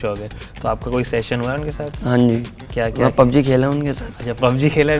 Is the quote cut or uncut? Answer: uncut